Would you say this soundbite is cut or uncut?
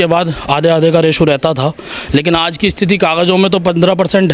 uncut